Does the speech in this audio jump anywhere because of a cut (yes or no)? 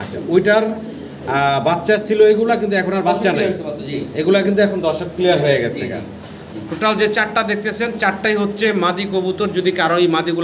yes